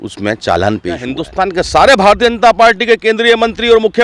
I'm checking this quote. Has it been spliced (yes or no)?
yes